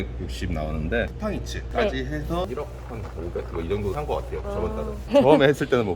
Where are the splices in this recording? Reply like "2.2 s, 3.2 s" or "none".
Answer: 1.1 s, 5.0 s